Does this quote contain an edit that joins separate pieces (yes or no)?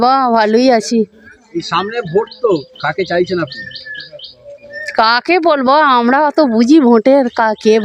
no